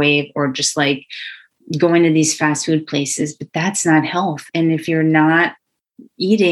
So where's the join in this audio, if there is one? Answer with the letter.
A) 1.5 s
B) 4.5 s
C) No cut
B